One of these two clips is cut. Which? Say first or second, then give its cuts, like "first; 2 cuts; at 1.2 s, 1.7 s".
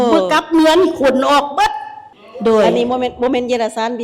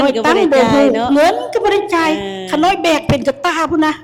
first; 1 cut; at 2.2 s